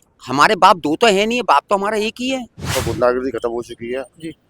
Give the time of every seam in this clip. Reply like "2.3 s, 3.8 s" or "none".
2.7 s